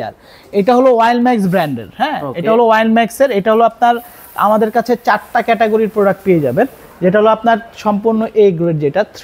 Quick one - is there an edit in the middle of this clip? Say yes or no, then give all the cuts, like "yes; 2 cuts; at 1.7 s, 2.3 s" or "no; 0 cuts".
no; 0 cuts